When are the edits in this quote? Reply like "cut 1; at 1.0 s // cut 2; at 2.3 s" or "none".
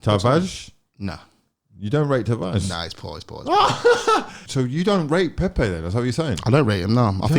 cut 1; at 4.4 s